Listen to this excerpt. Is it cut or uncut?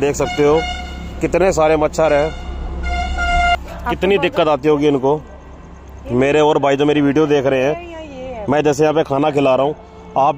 uncut